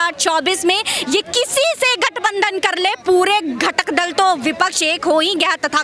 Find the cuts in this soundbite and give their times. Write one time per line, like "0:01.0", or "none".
none